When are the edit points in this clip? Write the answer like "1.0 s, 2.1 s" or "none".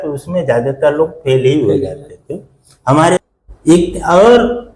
3.2 s

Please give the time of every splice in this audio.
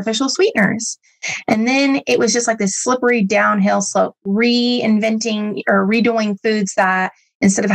none

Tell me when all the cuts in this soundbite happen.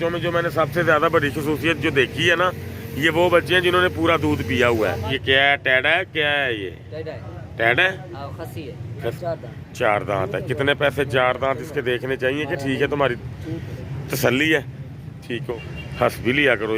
5.1 s, 9.2 s, 15.5 s

